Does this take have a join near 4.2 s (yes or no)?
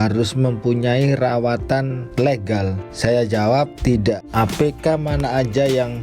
yes